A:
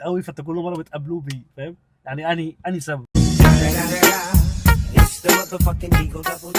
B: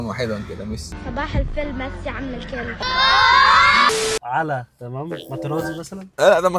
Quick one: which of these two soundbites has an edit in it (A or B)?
B